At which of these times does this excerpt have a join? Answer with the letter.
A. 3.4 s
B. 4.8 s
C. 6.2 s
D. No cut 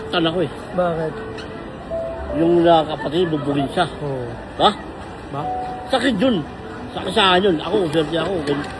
D